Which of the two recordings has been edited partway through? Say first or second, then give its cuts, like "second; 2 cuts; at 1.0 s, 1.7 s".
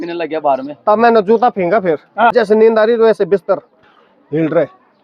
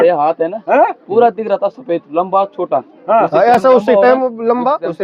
first; 1 cut; at 2.3 s